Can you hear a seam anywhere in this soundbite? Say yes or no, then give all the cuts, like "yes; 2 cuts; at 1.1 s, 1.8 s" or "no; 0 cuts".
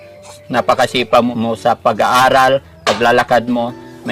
no; 0 cuts